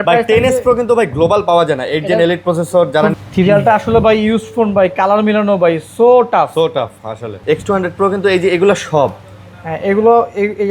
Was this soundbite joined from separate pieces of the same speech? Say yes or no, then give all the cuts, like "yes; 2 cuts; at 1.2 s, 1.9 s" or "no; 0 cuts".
yes; 2 cuts; at 3.1 s, 7.3 s